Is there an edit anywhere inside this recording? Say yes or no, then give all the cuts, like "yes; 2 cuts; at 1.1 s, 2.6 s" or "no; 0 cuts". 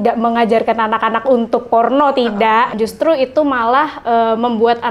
yes; 1 cut; at 2.7 s